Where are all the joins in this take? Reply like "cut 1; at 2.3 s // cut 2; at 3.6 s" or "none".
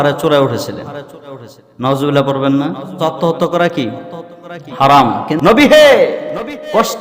cut 1; at 3.0 s // cut 2; at 5.3 s